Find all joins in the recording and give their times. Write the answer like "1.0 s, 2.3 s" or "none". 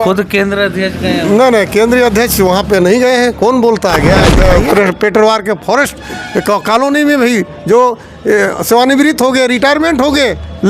4.3 s